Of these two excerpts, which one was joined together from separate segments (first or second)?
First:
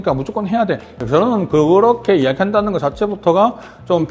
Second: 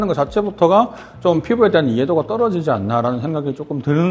first